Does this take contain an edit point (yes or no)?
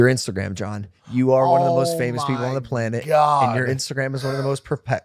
no